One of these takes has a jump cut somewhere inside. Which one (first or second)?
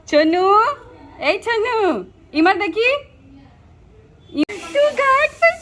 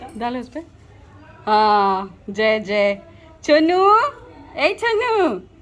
first